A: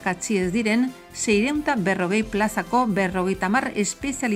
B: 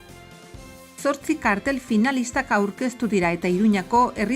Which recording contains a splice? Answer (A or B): B